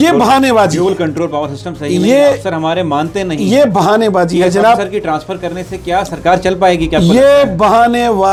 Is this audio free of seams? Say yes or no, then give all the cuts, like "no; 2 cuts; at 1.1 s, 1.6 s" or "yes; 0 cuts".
yes; 0 cuts